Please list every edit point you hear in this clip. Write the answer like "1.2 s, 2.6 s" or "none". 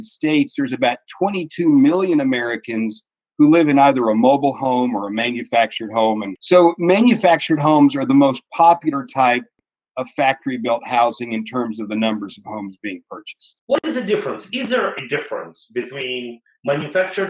none